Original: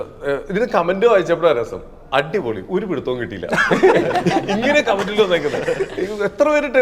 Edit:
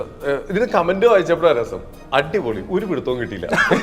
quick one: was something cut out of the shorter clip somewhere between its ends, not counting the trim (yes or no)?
no